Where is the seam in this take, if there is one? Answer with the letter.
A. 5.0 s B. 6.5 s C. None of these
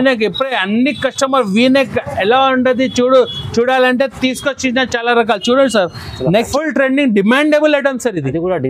B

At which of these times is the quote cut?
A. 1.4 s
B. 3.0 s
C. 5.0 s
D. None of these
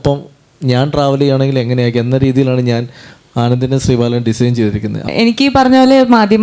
C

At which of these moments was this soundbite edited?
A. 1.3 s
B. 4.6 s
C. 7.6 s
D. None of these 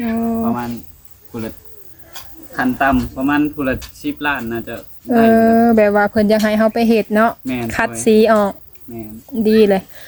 D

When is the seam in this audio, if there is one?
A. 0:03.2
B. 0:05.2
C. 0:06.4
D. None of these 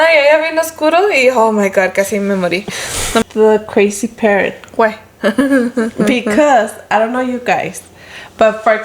A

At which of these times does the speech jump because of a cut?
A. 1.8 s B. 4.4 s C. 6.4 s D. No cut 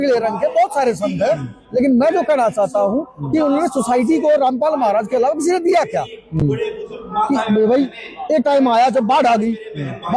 D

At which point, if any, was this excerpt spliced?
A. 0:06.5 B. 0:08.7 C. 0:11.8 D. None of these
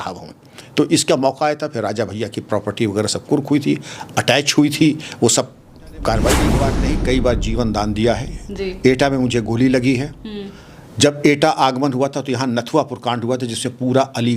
A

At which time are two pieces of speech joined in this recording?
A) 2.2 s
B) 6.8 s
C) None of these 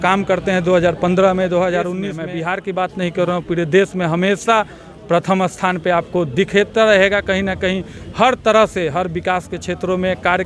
A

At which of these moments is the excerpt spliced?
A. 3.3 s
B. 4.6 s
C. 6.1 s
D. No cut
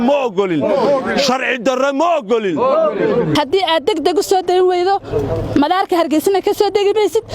A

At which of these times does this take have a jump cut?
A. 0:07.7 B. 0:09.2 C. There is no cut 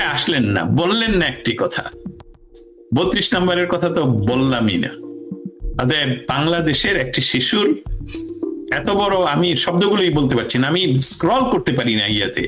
C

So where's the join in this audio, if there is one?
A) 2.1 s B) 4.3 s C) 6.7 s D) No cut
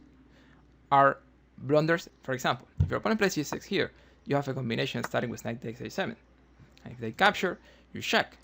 A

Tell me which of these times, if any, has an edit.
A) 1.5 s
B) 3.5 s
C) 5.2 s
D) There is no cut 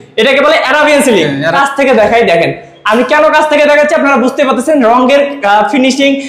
A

